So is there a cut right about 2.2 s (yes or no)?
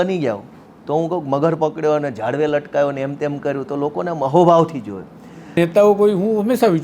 no